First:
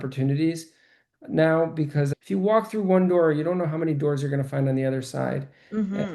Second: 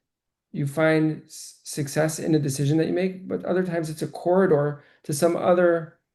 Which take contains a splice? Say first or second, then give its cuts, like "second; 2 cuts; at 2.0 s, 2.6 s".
first; 1 cut; at 2.1 s